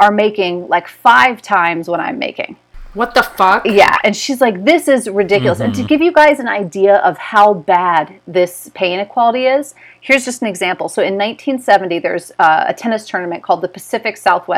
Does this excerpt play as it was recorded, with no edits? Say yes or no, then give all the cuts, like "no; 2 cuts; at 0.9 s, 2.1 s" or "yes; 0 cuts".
yes; 0 cuts